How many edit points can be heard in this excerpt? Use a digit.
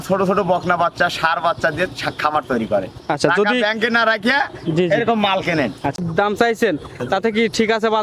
1